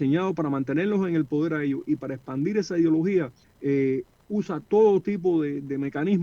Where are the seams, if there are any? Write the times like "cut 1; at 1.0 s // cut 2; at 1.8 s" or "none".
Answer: cut 1; at 3.4 s